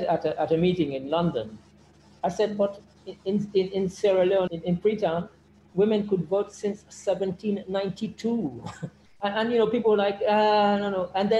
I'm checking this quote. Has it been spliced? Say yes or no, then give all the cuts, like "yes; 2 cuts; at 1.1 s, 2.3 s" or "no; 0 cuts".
yes; 2 cuts; at 4.5 s, 9.0 s